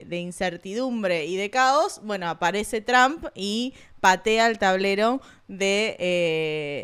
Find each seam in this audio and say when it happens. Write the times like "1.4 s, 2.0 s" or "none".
none